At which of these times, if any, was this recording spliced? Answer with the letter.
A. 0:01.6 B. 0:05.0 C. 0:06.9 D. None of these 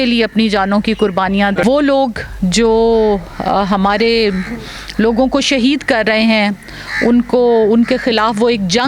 A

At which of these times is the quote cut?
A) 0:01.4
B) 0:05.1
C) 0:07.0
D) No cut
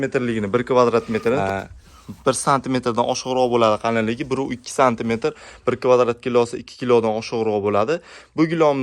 A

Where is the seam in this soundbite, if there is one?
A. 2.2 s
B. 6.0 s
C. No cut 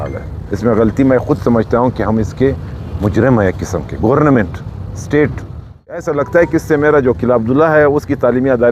B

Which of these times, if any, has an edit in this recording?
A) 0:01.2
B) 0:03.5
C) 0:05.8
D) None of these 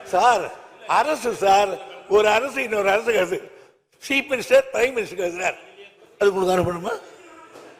D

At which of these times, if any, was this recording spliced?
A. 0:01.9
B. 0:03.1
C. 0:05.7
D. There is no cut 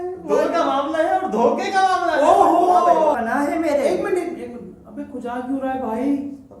B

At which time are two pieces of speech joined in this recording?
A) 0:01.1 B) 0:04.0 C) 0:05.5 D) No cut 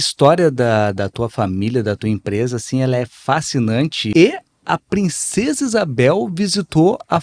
B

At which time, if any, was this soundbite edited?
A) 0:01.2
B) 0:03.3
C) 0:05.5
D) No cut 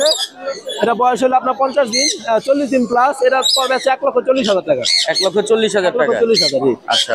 D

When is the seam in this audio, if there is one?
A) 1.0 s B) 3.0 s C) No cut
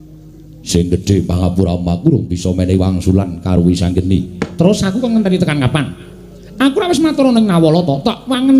A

